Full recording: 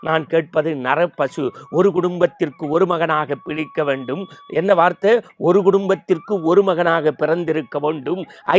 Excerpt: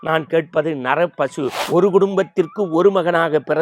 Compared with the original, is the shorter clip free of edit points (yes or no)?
no